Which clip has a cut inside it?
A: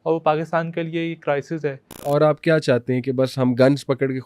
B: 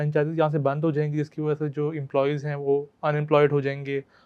A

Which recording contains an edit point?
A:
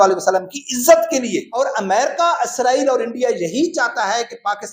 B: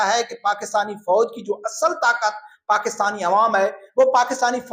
A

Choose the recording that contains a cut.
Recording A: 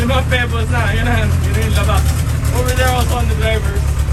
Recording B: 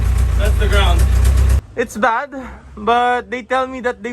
B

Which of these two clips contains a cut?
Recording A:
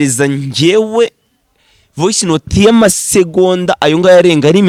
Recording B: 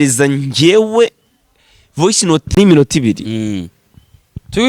B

